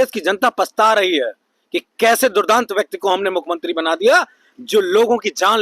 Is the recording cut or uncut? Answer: uncut